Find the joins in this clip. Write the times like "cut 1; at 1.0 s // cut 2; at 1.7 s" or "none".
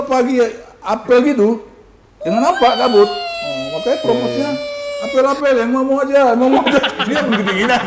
none